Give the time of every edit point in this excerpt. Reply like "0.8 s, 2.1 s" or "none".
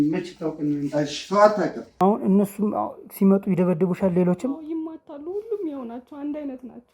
1.8 s